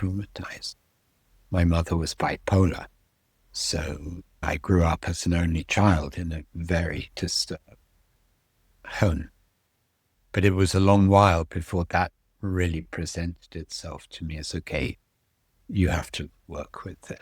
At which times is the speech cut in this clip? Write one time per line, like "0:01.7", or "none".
0:04.4